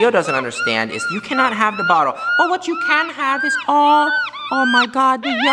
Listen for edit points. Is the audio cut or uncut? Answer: uncut